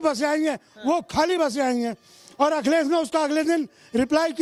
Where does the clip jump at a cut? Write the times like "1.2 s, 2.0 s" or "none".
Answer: none